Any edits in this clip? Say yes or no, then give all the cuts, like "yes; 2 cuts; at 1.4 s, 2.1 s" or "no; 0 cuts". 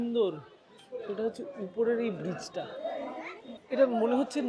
no; 0 cuts